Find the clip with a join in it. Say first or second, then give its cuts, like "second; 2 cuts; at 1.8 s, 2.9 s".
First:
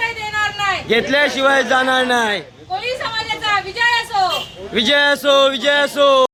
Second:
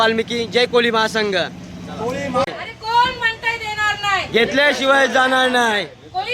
second; 1 cut; at 2.5 s